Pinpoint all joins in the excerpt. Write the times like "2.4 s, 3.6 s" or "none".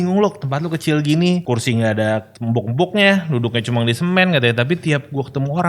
1.4 s, 2.3 s